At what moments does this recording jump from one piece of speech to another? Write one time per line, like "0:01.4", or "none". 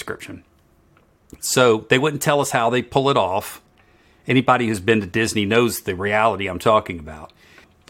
none